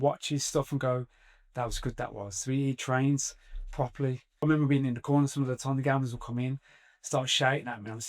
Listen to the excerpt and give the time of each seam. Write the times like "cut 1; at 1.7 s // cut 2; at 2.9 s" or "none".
cut 1; at 4.4 s